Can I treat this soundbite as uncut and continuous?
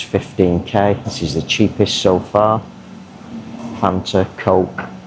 yes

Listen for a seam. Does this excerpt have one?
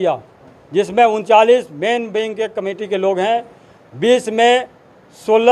no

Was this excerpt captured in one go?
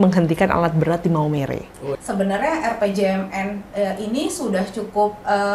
no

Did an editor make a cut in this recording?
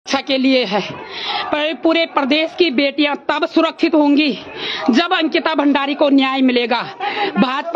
no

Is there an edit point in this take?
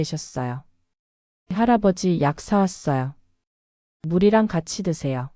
no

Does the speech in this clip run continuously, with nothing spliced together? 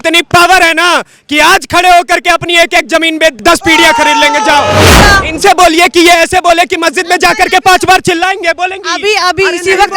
no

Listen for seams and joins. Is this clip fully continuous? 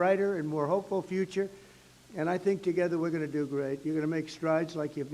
yes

